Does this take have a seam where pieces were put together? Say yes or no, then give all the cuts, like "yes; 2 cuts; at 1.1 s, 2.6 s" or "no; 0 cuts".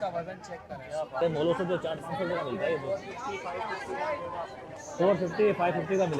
yes; 1 cut; at 1.2 s